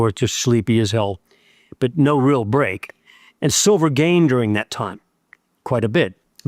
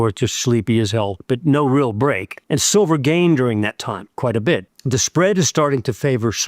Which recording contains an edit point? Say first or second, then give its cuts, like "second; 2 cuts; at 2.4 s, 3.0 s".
second; 4 cuts; at 1.2 s, 2.3 s, 4.1 s, 4.7 s